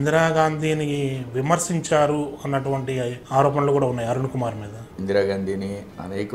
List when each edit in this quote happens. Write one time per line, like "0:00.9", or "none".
0:03.2
0:04.9